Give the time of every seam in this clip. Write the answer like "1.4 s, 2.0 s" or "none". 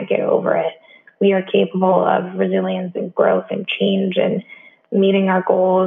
none